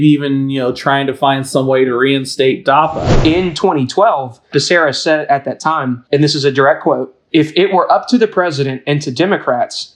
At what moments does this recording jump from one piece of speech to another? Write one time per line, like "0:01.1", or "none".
0:03.1
0:04.5
0:06.0
0:07.1